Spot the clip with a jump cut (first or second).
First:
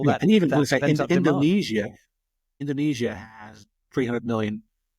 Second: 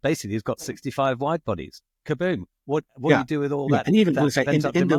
first